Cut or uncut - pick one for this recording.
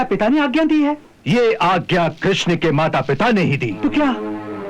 cut